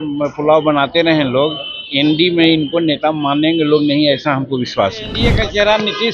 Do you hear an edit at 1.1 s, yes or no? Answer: no